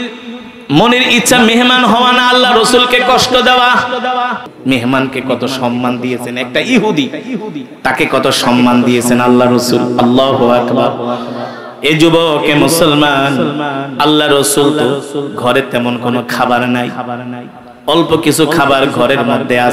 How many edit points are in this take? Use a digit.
1